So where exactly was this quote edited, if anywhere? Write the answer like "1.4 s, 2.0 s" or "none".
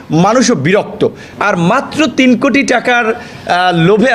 1.3 s